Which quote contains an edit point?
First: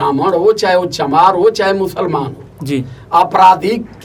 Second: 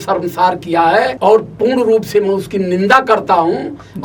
second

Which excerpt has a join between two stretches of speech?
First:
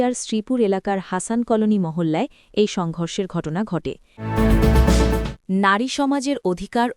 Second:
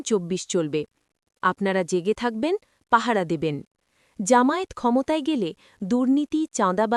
first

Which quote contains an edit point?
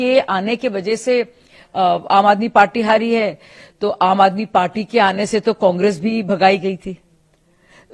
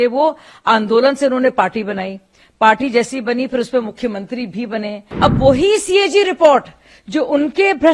second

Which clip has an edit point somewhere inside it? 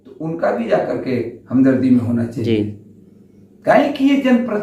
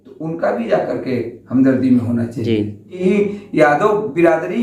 second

